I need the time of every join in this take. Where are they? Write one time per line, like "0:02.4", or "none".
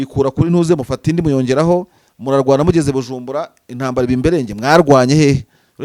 none